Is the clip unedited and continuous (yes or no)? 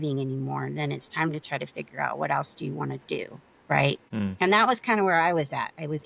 no